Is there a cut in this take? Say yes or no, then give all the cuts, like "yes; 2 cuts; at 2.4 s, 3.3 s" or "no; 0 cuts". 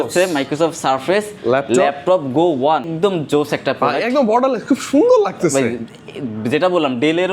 yes; 1 cut; at 2.9 s